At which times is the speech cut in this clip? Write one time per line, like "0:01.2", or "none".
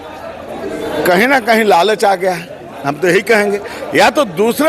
none